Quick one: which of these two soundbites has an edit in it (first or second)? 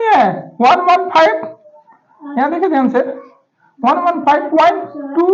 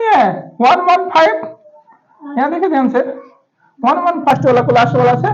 second